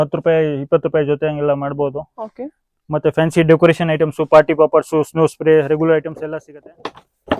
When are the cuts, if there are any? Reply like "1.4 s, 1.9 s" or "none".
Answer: 6.2 s